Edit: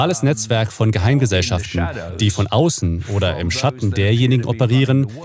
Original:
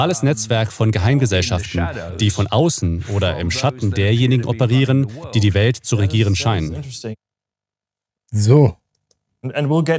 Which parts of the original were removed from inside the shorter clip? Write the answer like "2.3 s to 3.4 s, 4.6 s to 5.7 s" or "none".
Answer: none